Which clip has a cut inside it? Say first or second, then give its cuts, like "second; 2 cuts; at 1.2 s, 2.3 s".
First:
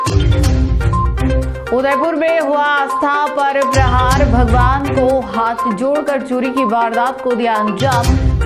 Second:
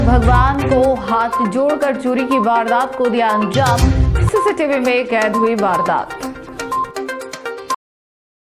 first; 1 cut; at 1.3 s